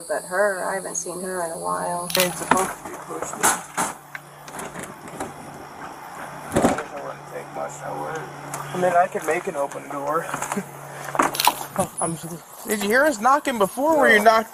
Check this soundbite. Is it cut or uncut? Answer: cut